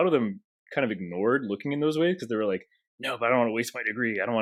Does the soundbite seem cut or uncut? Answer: uncut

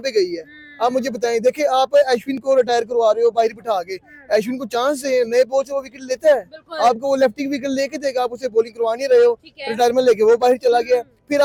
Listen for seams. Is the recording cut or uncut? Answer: uncut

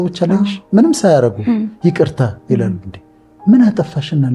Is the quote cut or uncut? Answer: uncut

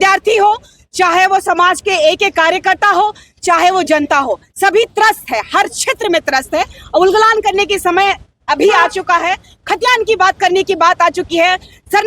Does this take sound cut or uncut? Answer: uncut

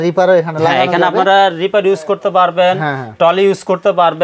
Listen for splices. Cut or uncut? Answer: uncut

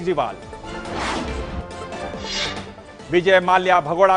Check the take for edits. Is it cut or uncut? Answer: uncut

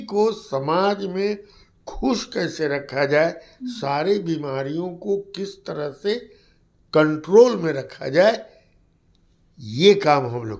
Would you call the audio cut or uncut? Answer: uncut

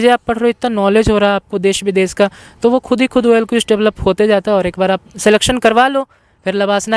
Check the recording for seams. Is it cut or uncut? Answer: uncut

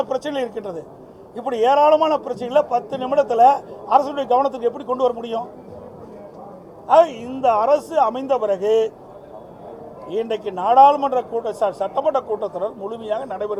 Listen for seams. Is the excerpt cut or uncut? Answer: uncut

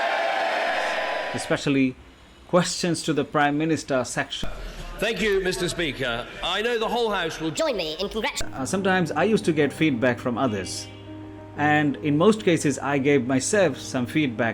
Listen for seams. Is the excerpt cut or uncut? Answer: cut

